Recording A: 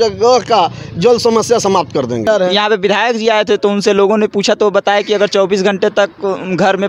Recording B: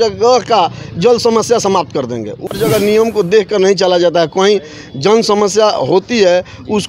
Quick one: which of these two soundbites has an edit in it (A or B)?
B